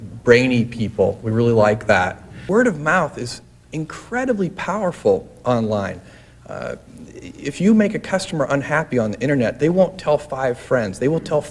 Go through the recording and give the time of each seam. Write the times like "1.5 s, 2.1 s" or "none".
2.3 s